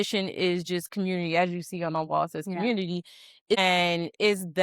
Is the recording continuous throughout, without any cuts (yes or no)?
no